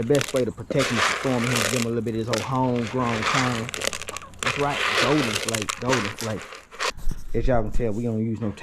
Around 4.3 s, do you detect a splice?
no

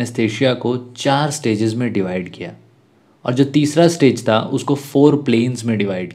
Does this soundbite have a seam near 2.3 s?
no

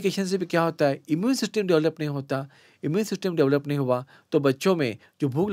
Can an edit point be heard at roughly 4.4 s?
no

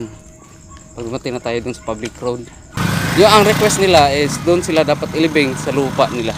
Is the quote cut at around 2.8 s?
yes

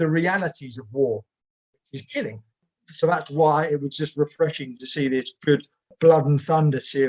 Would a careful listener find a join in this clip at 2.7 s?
yes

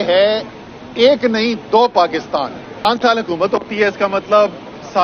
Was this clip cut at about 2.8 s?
yes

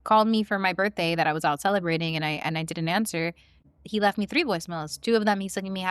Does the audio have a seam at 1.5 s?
no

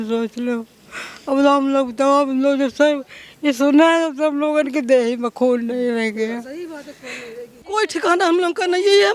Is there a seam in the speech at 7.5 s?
yes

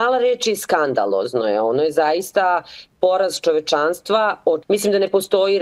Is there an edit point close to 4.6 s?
yes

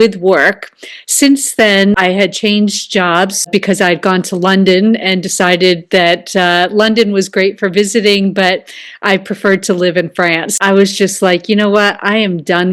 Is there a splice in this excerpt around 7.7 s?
no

